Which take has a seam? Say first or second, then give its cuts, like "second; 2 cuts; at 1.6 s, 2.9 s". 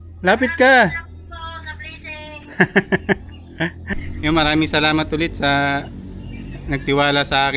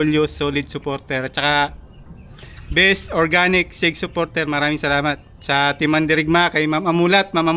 first; 1 cut; at 3.8 s